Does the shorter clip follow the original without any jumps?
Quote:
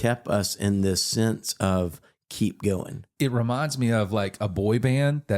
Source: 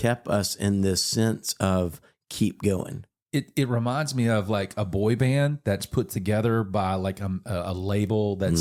no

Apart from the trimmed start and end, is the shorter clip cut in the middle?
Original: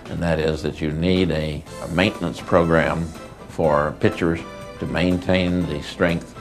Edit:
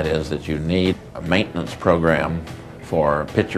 yes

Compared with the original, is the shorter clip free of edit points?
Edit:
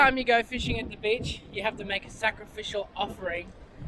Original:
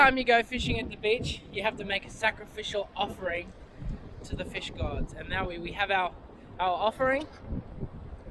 yes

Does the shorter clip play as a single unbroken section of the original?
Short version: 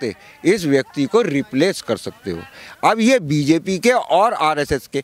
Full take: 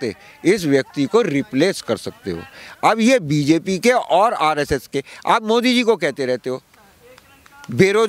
yes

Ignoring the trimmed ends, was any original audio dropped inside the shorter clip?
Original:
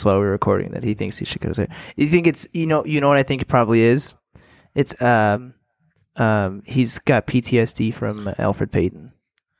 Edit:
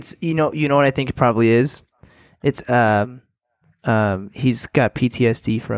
no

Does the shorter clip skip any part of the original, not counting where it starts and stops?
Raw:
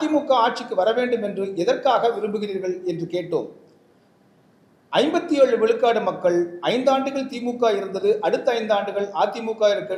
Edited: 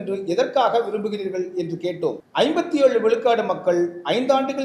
yes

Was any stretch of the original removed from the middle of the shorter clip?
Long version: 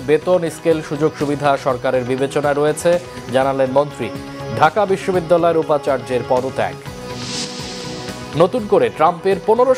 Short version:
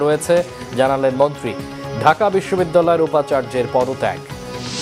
no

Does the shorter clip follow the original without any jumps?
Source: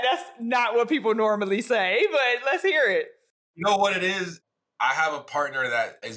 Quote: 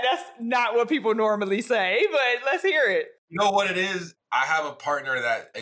no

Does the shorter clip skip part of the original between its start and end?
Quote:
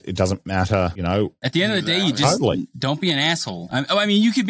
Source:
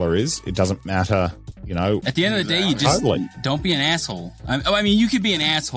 yes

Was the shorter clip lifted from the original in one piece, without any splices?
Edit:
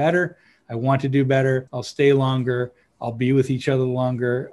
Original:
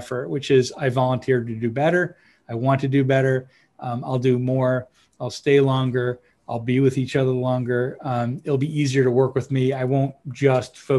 no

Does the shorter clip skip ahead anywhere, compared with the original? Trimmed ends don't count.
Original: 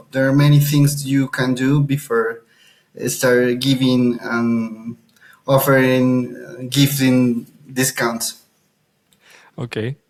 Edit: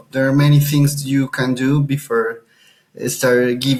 no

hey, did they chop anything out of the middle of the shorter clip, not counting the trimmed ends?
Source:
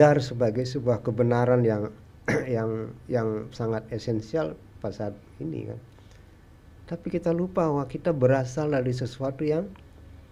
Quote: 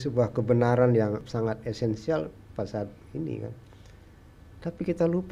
yes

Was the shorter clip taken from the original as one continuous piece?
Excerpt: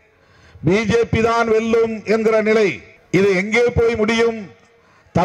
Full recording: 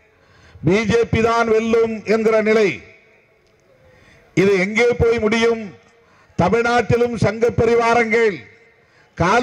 no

